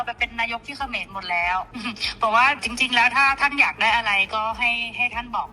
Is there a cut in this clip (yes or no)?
yes